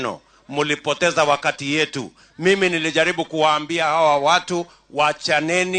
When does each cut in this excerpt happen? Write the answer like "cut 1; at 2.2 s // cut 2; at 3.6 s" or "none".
none